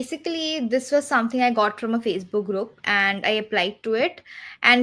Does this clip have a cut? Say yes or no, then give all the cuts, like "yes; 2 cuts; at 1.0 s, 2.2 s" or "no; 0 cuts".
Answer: no; 0 cuts